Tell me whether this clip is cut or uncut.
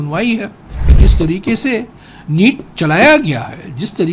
cut